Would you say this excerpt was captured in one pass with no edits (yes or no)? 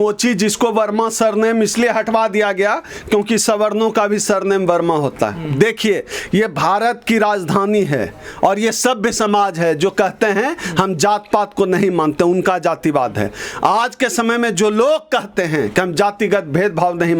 yes